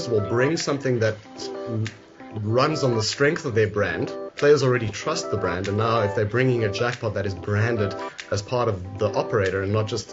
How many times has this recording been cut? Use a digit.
0